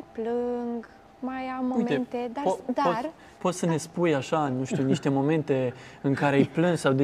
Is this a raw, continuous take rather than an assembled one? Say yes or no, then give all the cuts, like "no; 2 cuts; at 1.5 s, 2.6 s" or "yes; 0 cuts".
yes; 0 cuts